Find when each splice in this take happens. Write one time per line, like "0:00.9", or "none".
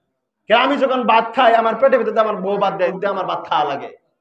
0:02.9